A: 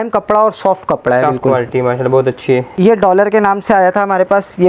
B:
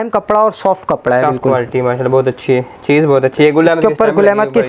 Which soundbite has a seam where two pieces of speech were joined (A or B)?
A